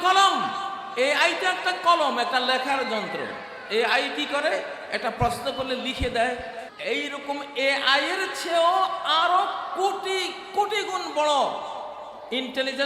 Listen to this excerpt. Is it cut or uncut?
cut